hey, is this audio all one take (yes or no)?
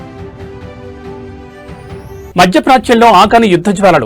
no